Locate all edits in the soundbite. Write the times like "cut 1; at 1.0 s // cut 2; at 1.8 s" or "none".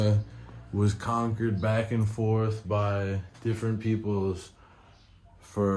none